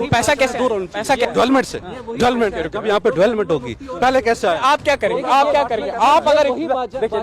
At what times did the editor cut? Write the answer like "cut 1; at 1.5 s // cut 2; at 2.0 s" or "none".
cut 1; at 1.2 s